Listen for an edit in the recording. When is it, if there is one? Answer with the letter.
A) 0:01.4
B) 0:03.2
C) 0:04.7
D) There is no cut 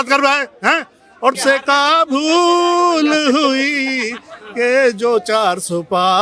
A